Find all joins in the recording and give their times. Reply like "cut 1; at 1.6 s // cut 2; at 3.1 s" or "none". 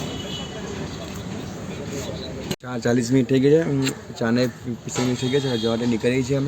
cut 1; at 2.6 s